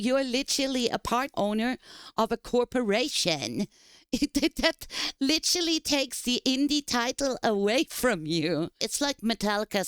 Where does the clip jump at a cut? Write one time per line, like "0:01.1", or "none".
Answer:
0:08.9